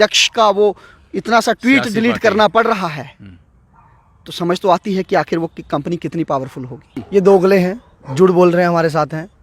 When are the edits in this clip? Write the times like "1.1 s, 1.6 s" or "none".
7.0 s